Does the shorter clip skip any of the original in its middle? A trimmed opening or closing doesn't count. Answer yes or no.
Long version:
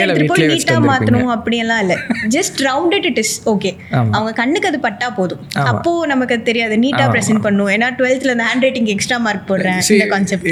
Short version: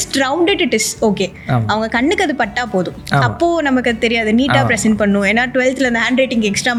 no